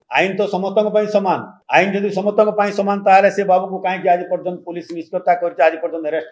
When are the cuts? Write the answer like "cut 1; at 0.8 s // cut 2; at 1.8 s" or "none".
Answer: cut 1; at 1.5 s